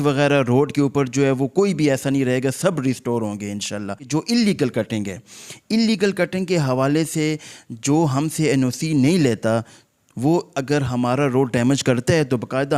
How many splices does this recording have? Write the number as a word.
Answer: one